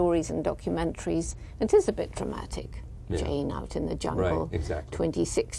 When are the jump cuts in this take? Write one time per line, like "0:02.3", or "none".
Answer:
0:01.2